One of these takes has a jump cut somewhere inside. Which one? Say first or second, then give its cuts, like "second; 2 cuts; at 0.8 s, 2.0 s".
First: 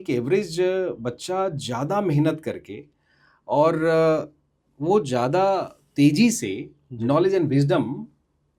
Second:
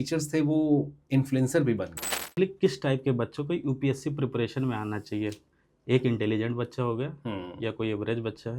second; 1 cut; at 2.4 s